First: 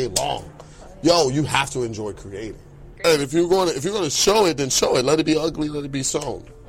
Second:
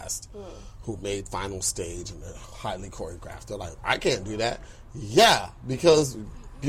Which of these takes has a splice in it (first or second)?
first